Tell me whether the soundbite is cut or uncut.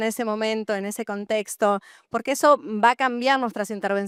uncut